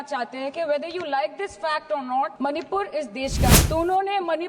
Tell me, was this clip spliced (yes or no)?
yes